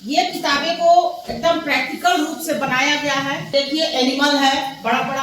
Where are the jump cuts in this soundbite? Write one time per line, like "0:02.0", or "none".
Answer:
0:03.5